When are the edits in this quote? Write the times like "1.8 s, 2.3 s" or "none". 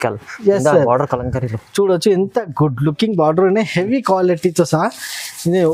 none